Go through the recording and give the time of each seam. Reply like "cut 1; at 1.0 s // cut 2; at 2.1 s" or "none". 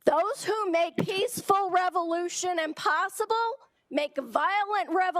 cut 1; at 1.0 s